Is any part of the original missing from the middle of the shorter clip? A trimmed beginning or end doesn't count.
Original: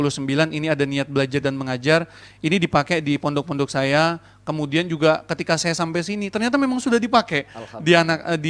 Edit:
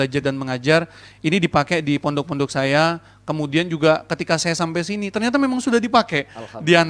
no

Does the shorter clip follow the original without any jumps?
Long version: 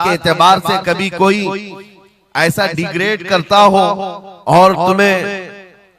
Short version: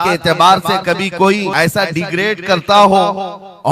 no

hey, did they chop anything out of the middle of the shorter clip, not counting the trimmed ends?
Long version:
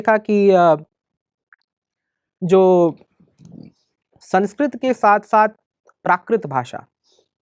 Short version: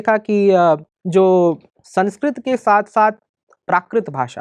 yes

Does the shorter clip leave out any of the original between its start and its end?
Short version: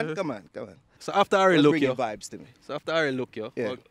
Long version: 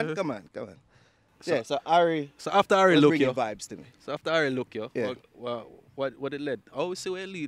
yes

